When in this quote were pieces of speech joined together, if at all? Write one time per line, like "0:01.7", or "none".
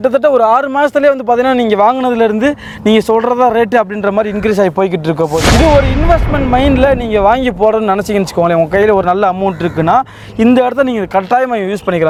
none